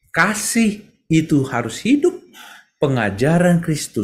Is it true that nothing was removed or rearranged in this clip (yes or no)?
yes